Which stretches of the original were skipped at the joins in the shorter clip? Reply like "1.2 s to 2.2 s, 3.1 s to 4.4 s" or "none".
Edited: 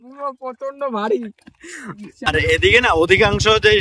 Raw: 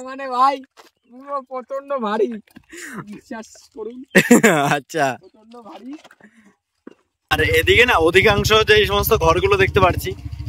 3.2 s to 7.1 s